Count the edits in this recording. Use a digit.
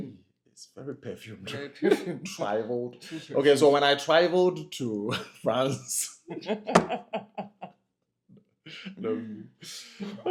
0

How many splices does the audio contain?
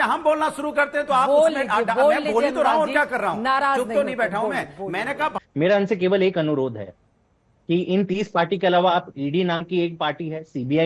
1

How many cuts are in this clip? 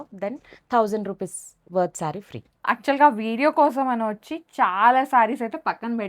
1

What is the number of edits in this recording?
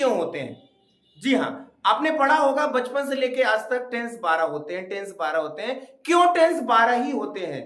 0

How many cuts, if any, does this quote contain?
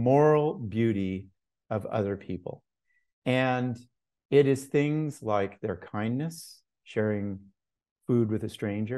0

